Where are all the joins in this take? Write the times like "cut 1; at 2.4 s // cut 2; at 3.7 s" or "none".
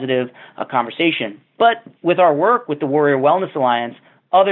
none